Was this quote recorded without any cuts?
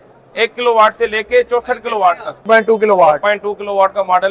no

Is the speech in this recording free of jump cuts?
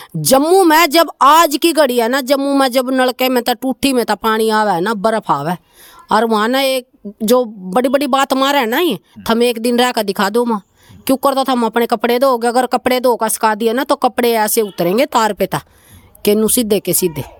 yes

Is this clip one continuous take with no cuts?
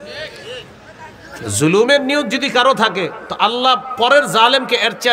yes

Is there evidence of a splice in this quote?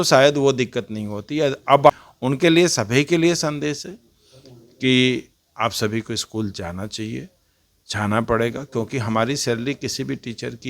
yes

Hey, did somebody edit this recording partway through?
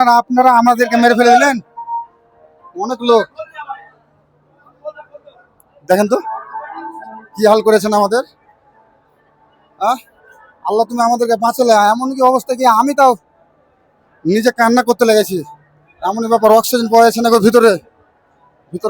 no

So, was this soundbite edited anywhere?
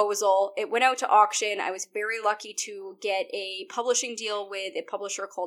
no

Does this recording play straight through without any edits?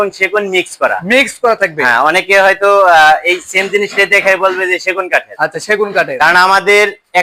yes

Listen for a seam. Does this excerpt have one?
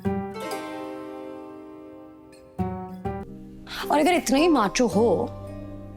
yes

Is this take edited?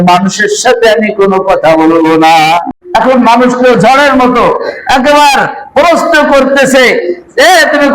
yes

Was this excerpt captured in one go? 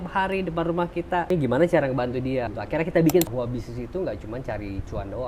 no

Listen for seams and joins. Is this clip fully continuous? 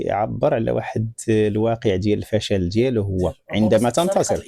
yes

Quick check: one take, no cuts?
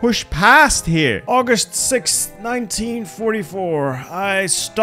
no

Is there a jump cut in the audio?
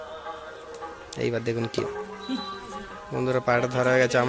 yes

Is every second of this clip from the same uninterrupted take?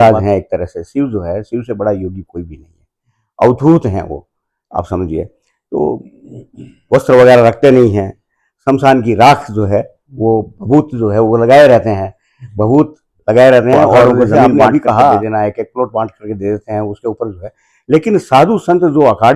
no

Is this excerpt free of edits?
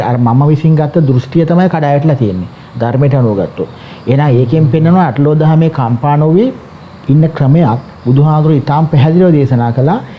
yes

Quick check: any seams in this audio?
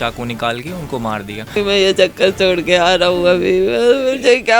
yes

